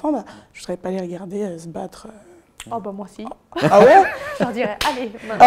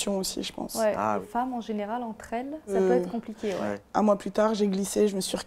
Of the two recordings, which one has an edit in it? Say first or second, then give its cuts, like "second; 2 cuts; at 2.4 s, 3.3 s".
second; 3 cuts; at 1.2 s, 2.7 s, 3.8 s